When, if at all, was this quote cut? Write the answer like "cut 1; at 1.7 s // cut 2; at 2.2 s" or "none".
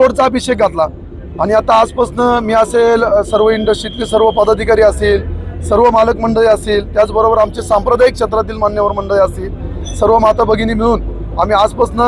none